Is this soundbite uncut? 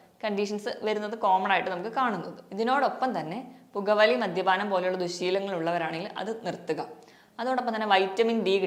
yes; 0 cuts

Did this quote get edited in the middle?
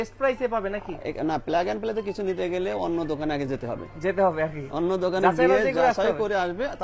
no; 0 cuts

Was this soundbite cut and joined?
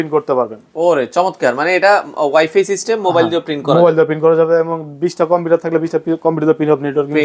no; 0 cuts

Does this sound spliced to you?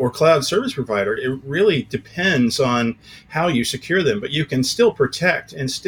no; 0 cuts

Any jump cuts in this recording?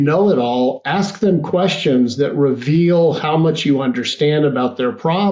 no; 0 cuts

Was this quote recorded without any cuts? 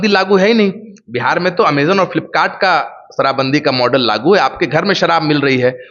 yes; 0 cuts

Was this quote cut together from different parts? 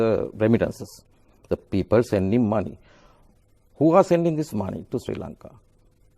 no; 0 cuts

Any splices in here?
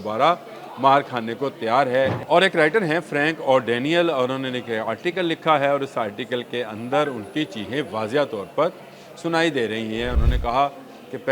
yes; 2 cuts; at 2.3 s, 10.2 s

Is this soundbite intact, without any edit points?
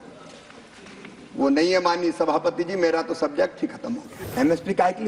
no; 1 cut; at 4.2 s

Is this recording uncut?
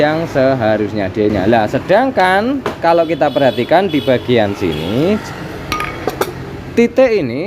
no; 1 cut; at 1.3 s

